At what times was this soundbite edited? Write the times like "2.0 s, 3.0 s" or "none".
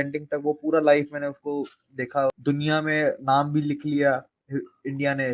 2.4 s